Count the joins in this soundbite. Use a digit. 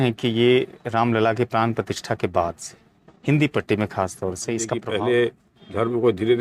1